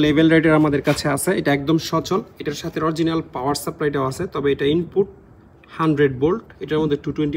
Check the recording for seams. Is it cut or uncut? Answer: uncut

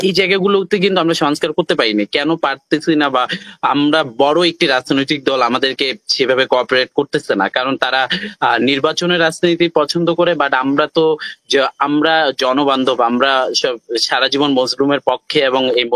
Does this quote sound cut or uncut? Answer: uncut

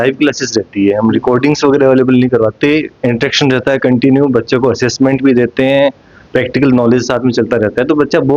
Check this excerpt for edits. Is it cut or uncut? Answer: uncut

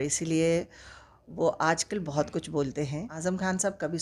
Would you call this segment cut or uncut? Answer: cut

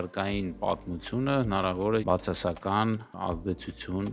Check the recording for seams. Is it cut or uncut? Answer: cut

